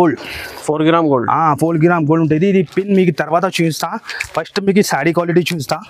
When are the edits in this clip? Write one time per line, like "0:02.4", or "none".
none